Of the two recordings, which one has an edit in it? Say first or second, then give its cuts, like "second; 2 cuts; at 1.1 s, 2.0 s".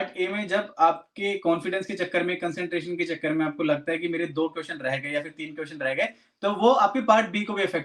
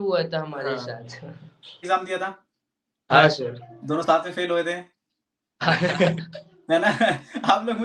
second; 1 cut; at 1.8 s